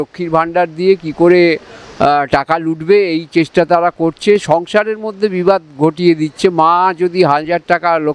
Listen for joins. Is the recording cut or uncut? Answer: uncut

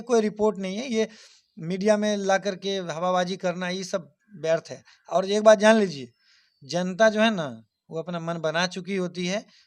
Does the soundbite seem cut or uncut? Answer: uncut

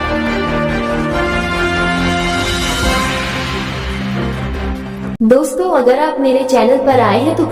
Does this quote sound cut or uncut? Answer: uncut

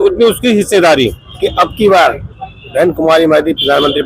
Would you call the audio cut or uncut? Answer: cut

